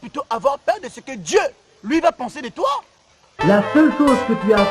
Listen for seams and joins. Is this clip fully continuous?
no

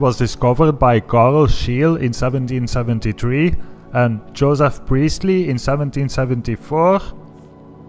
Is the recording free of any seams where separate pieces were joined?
yes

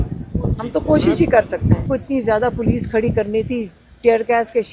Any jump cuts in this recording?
yes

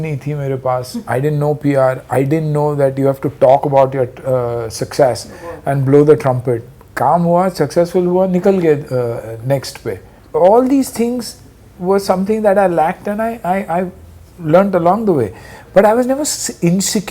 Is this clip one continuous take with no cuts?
yes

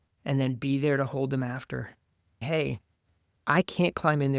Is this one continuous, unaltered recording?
no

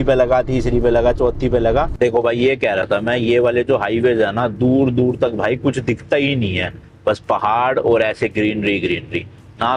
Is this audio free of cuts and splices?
no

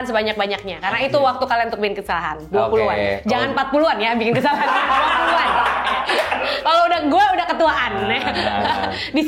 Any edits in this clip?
no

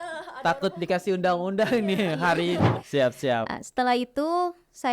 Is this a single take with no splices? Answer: no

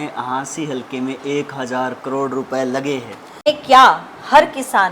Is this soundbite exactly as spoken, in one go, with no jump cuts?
no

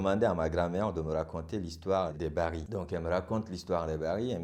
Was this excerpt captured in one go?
yes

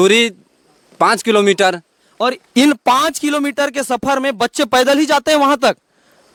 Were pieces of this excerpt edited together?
no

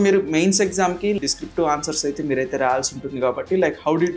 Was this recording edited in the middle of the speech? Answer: yes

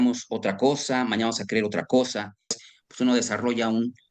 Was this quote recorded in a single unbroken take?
no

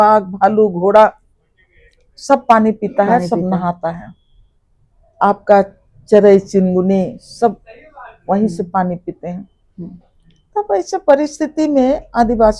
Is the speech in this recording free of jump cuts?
yes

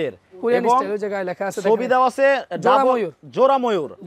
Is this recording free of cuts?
yes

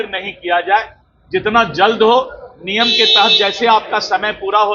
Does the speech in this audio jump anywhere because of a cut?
no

